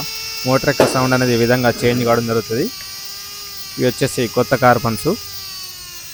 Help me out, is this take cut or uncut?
uncut